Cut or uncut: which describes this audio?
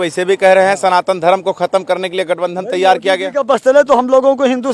uncut